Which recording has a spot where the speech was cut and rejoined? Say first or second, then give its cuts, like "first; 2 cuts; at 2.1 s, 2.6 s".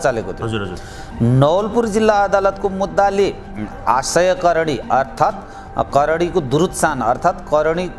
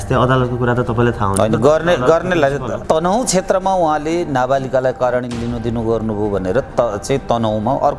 second; 1 cut; at 2.8 s